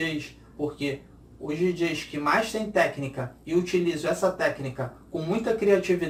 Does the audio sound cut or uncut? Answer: uncut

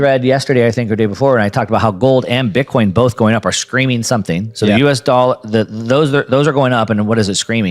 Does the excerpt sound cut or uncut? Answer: uncut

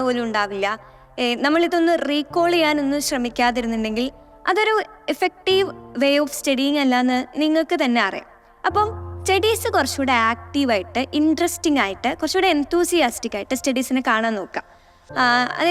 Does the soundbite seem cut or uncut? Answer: uncut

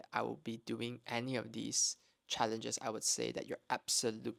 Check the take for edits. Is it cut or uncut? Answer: uncut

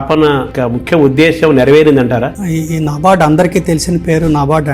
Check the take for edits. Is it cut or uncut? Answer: cut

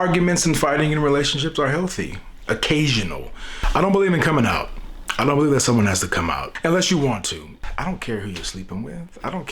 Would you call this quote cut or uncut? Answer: cut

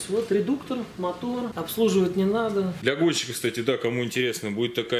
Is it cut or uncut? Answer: cut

